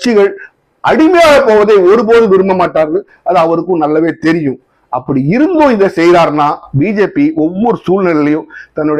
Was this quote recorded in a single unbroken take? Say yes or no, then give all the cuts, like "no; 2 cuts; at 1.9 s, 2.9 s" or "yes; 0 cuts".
yes; 0 cuts